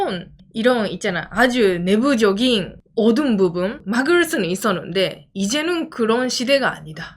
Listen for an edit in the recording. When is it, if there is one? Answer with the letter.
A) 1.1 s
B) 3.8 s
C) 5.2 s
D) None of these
B